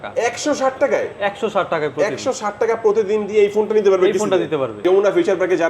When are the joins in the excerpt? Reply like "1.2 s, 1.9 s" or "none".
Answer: 4.8 s